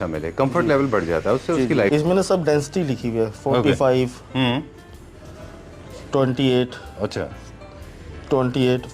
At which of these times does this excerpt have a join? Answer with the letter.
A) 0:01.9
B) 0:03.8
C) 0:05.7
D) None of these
A